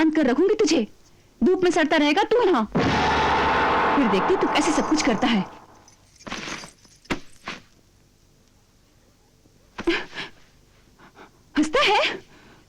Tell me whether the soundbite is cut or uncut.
uncut